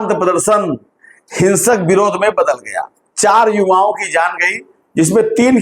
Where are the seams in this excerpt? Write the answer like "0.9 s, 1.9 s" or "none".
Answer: 3.0 s